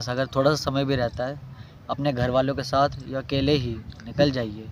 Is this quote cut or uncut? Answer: uncut